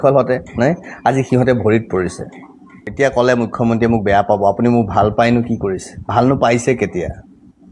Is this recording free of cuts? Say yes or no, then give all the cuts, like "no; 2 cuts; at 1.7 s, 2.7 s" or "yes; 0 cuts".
no; 1 cut; at 2.8 s